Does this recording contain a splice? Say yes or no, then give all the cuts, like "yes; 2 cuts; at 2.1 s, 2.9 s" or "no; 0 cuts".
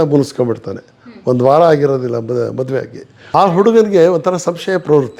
yes; 1 cut; at 3.2 s